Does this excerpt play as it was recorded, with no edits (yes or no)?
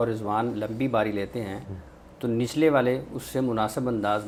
yes